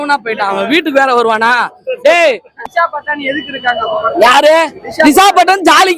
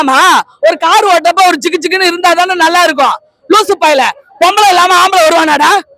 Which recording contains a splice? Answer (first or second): first